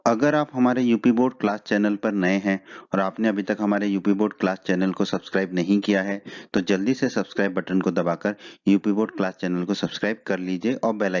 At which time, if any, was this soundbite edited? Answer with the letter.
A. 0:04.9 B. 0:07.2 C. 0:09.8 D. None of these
C